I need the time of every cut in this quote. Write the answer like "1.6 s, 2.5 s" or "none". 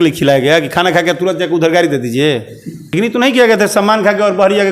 2.8 s